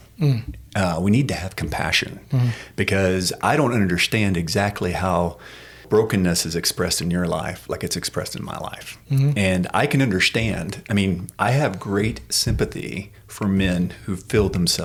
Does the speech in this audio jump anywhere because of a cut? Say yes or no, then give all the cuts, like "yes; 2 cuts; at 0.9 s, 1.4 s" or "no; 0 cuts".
no; 0 cuts